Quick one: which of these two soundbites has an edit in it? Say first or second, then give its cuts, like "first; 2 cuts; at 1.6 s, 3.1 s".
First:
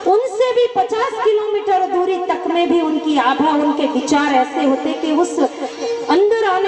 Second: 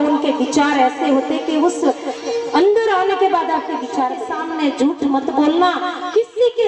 second; 1 cut; at 4.2 s